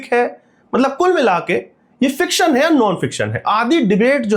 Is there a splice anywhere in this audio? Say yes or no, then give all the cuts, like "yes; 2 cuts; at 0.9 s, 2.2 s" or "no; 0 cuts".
no; 0 cuts